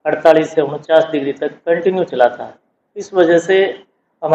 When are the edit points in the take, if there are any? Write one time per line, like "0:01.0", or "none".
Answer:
none